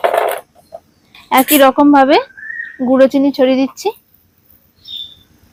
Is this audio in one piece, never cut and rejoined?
yes; 0 cuts

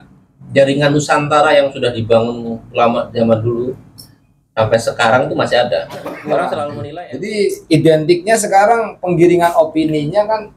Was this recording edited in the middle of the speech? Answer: yes; 1 cut; at 6.8 s

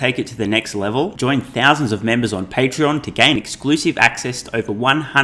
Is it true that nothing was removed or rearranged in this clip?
yes; 0 cuts

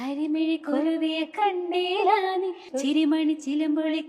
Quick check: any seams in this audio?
yes; 1 cut; at 2.6 s

